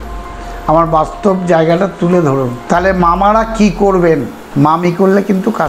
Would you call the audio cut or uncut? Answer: cut